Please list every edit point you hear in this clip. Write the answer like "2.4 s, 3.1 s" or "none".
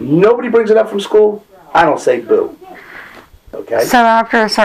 3.5 s